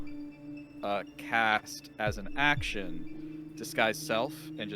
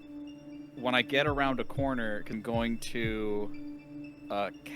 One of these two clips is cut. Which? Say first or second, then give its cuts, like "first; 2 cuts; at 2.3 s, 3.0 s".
second; 1 cut; at 2.3 s